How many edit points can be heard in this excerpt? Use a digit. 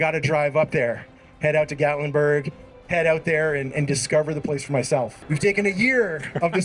1